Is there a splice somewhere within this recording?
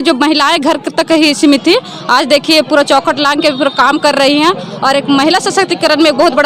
no; 0 cuts

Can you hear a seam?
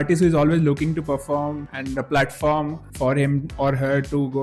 yes; 2 cuts; at 1.7 s, 2.8 s

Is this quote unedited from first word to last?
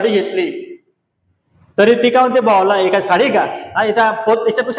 yes; 0 cuts

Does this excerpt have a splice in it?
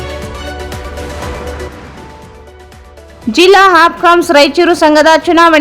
no; 0 cuts

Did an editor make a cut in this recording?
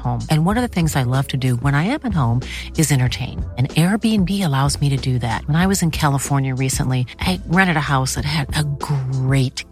no; 0 cuts

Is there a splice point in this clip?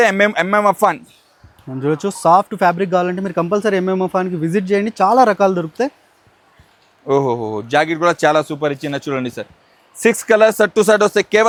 no; 0 cuts

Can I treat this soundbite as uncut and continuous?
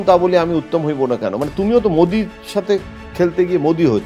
yes; 0 cuts

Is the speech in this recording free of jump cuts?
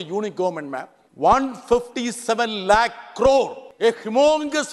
no; 2 cuts; at 1.0 s, 3.6 s

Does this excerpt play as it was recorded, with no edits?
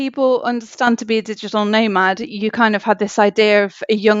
yes; 0 cuts

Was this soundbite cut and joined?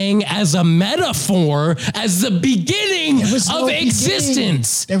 no; 0 cuts

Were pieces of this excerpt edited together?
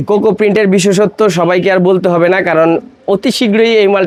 no; 0 cuts

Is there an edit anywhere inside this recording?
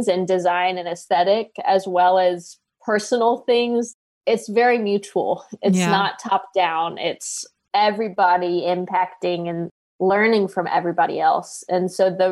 yes; 1 cut; at 3.9 s

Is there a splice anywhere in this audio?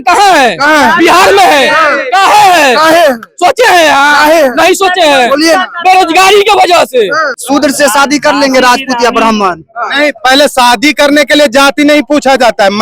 yes; 1 cut; at 7.3 s

